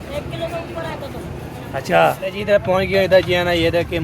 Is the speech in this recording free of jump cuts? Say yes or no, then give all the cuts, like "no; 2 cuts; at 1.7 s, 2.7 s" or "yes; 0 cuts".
no; 1 cut; at 2.3 s